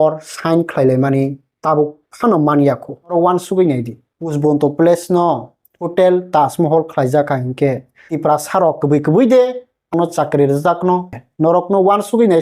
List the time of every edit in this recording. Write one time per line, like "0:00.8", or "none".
0:09.9
0:11.2